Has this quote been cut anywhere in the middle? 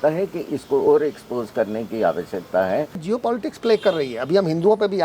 yes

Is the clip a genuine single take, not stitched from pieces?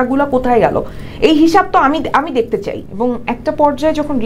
no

